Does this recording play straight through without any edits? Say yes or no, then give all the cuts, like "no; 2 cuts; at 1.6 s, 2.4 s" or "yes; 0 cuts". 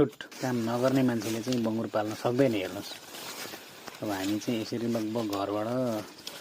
yes; 0 cuts